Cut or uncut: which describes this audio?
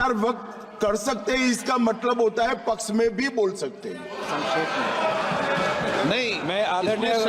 uncut